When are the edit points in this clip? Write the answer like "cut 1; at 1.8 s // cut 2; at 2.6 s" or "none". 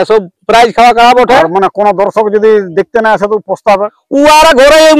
none

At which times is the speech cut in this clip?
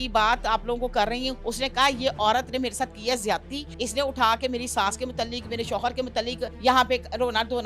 cut 1; at 1.4 s // cut 2; at 3.6 s // cut 3; at 6.5 s

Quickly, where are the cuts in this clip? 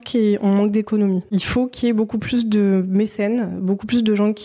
none

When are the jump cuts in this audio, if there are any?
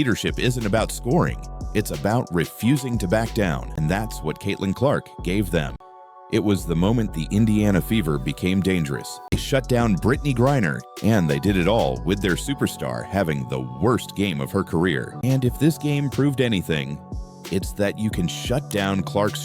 cut 1; at 3.7 s // cut 2; at 5.8 s // cut 3; at 9.3 s // cut 4; at 15.1 s

